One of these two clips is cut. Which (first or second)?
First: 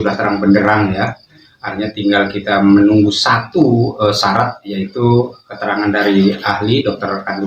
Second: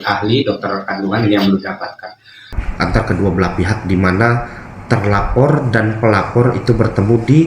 second